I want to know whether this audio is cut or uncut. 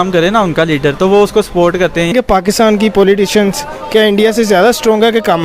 uncut